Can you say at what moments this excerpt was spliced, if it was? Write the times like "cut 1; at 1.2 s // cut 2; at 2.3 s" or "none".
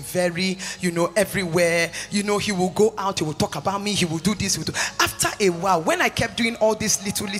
none